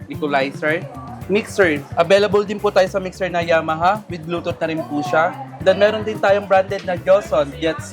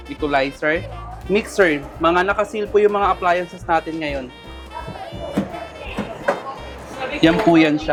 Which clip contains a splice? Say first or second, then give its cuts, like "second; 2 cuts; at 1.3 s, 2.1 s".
first; 1 cut; at 1.9 s